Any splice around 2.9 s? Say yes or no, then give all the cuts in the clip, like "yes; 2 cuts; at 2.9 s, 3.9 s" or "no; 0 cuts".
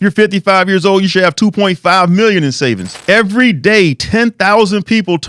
yes; 1 cut; at 2.9 s